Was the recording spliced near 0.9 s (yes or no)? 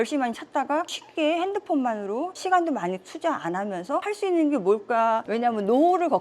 yes